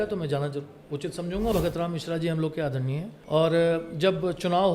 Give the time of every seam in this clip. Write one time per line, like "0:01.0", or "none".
0:01.5
0:03.1